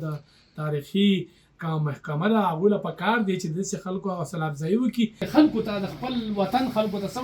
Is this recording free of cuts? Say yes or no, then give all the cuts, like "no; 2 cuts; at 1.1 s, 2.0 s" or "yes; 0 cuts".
no; 1 cut; at 5.3 s